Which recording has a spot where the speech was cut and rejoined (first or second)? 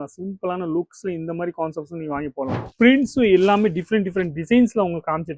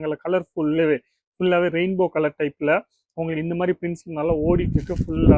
first